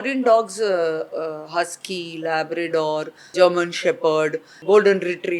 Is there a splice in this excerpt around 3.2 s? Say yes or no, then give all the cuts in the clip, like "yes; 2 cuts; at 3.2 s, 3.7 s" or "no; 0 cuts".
yes; 2 cuts; at 3.2 s, 4.5 s